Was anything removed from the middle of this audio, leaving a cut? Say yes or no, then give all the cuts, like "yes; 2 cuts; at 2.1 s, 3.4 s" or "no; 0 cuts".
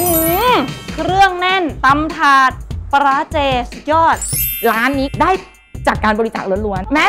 no; 0 cuts